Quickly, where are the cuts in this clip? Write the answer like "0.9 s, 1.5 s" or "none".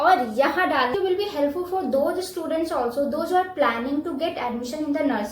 1.0 s